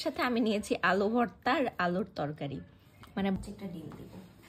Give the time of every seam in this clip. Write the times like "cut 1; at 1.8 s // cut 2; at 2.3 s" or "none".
cut 1; at 3.4 s